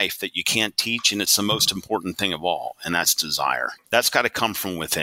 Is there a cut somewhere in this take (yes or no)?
yes